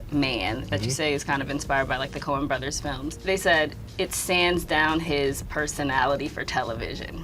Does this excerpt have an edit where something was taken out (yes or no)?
yes